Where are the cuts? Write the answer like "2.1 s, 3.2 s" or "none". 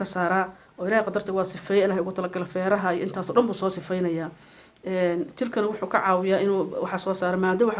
none